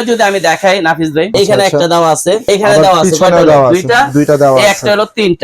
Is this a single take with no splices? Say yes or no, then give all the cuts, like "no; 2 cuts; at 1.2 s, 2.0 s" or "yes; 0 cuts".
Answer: no; 2 cuts; at 1.3 s, 2.4 s